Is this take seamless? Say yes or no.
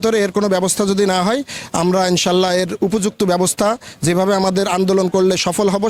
yes